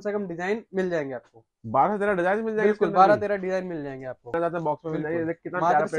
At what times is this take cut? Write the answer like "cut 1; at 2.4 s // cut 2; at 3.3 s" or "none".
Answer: cut 1; at 4.3 s